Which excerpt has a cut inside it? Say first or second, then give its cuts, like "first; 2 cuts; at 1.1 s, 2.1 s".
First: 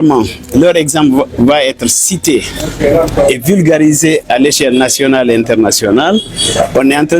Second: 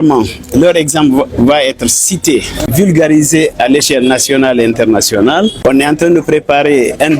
second; 2 cuts; at 2.7 s, 5.6 s